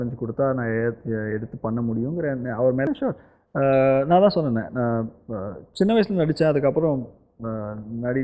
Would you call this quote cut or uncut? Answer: cut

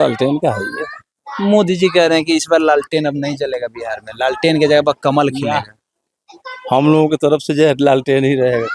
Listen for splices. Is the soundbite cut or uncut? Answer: uncut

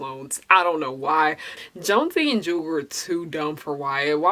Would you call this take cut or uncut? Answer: cut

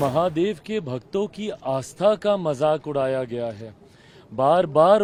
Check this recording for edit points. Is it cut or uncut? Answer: uncut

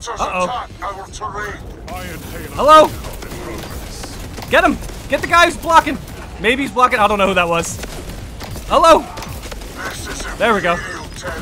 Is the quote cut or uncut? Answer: uncut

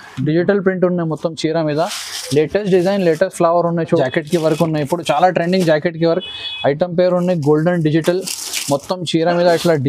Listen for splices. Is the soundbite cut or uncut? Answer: cut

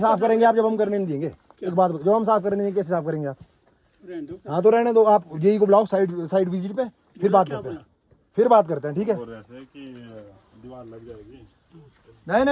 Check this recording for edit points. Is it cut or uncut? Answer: uncut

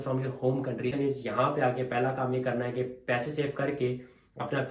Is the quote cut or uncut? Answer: cut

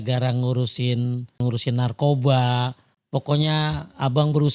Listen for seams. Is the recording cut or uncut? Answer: cut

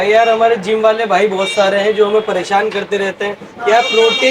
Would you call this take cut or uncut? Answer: uncut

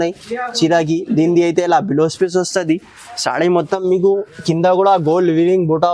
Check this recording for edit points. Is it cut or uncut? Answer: uncut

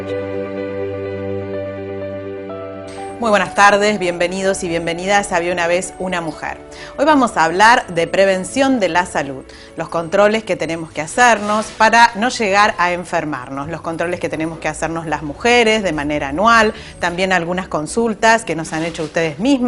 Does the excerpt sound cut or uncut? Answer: uncut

